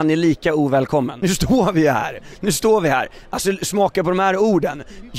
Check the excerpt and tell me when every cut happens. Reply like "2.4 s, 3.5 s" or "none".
1.1 s